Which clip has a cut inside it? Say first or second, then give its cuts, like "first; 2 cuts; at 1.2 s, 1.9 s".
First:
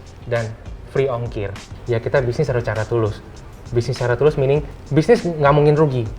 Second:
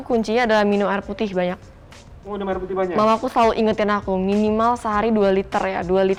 first; 2 cuts; at 1.7 s, 4.8 s